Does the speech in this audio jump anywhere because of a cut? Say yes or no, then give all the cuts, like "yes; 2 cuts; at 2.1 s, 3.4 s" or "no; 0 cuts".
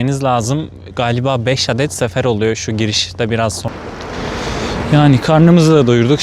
yes; 1 cut; at 3.6 s